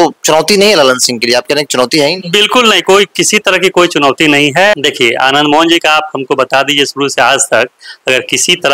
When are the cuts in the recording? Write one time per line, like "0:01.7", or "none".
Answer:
0:04.7